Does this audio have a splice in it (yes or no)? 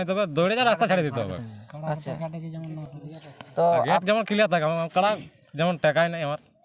no